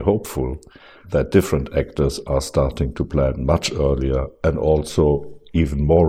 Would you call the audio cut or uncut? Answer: cut